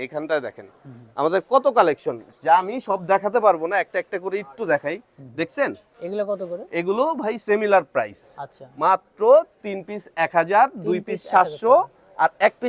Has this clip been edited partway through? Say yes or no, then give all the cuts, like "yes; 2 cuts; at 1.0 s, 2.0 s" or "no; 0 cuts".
no; 0 cuts